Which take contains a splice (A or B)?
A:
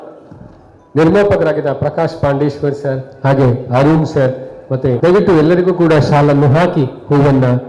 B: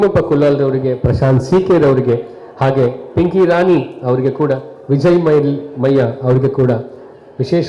A